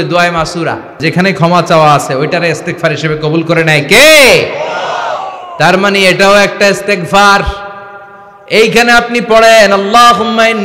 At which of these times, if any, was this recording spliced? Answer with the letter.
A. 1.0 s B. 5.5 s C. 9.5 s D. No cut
A